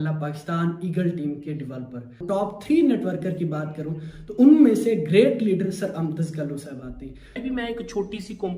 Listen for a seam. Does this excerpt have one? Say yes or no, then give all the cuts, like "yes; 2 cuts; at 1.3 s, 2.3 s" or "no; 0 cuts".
yes; 2 cuts; at 2.2 s, 7.4 s